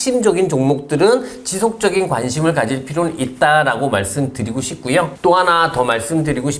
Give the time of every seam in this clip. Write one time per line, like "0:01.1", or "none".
none